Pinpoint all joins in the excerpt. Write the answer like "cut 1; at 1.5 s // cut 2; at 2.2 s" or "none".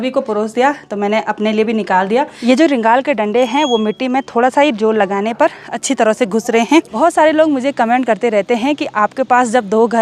cut 1; at 2.4 s // cut 2; at 6.9 s